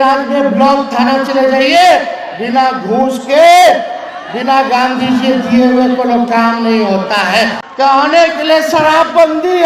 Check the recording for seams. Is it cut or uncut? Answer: cut